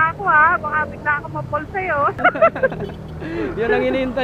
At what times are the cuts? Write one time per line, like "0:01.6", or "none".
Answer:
0:02.2